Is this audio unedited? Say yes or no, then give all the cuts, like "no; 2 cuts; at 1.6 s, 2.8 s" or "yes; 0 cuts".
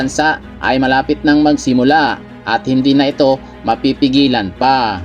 yes; 0 cuts